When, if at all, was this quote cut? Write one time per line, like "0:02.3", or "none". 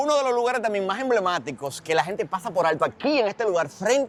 none